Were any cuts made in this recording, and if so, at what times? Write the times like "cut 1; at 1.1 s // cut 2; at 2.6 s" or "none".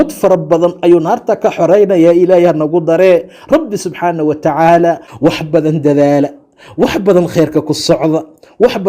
cut 1; at 5.1 s